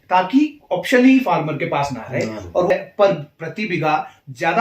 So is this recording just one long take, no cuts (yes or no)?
no